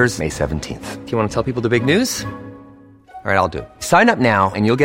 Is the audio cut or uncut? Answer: uncut